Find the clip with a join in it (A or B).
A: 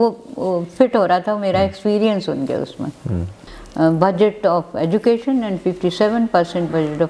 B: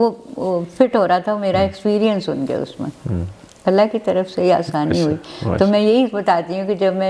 A